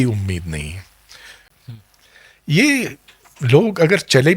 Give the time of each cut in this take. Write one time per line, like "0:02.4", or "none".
0:01.5